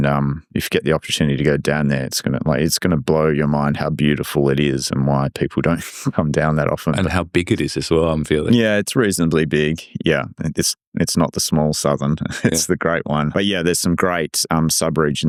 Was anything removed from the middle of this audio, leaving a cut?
no; 0 cuts

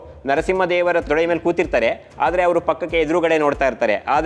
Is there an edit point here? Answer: yes; 1 cut; at 1.1 s

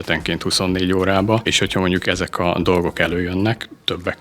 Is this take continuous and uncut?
no; 1 cut; at 1.5 s

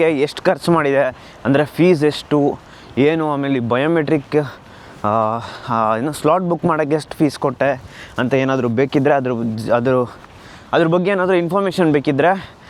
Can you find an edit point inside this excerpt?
no; 0 cuts

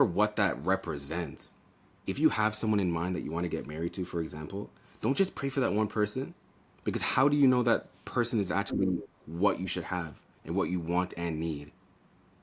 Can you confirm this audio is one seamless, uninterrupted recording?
yes; 0 cuts

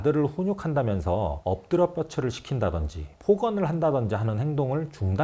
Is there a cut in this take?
no; 0 cuts

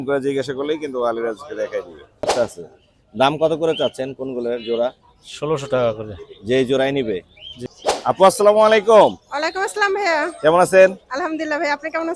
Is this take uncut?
no; 2 cuts; at 2.3 s, 7.8 s

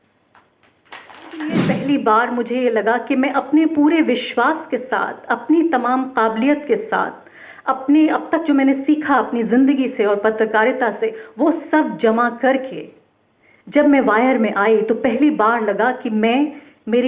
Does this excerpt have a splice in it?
yes; 1 cut; at 1.4 s

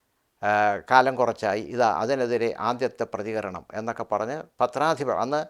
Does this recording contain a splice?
no; 0 cuts

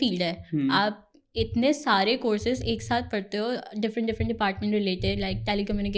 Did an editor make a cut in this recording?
no; 0 cuts

